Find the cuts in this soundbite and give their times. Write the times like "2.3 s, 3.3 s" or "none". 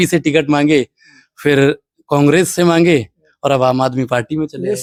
none